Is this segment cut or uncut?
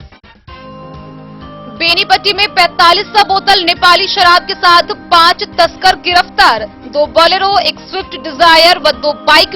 cut